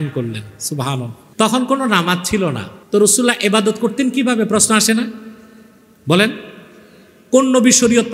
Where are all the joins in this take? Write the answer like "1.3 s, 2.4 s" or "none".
1.2 s, 2.7 s